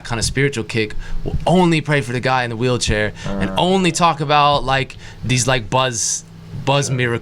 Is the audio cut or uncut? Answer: uncut